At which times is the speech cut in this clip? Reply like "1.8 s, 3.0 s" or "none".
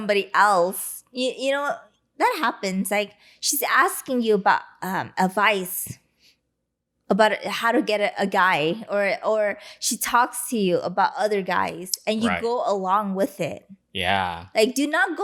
none